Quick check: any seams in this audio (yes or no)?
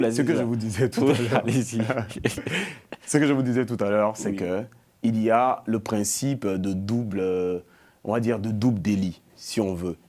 no